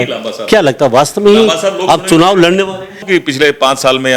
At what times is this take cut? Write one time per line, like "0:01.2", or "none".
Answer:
0:03.0